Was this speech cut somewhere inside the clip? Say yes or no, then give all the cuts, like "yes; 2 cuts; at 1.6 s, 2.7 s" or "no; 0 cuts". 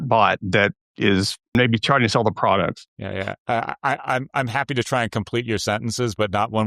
yes; 2 cuts; at 1.5 s, 2.9 s